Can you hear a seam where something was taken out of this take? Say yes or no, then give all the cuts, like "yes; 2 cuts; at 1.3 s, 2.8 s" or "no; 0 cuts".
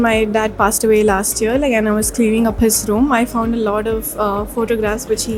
no; 0 cuts